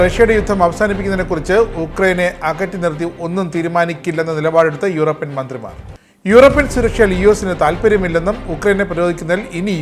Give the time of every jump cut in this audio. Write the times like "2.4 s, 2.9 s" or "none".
none